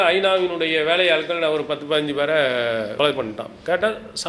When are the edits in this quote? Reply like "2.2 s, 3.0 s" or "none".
2.9 s

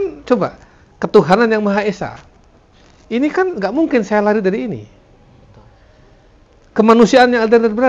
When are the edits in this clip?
none

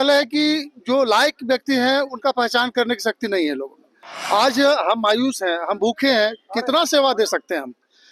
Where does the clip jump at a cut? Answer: none

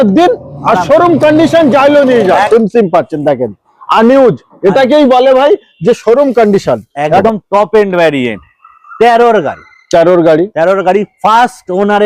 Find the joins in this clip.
2.5 s, 7.2 s

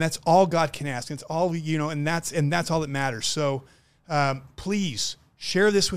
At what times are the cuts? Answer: none

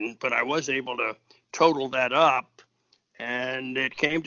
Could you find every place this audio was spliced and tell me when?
none

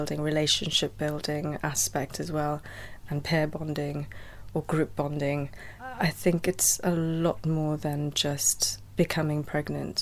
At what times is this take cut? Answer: none

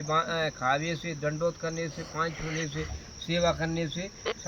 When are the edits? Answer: none

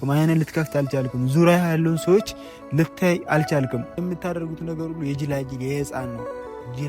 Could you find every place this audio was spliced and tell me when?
4.0 s

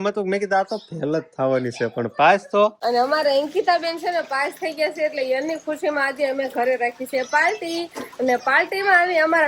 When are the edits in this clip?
2.8 s

